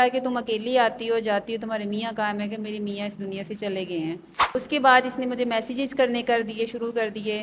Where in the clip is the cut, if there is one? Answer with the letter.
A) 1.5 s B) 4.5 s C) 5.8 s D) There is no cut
B